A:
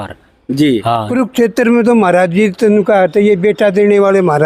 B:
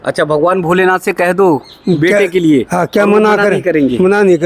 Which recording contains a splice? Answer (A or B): A